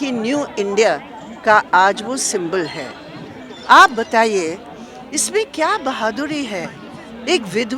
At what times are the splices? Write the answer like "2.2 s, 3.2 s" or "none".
none